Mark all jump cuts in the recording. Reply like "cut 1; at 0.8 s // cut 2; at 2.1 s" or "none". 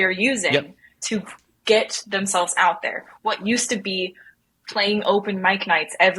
none